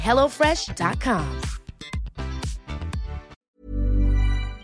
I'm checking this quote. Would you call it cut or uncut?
cut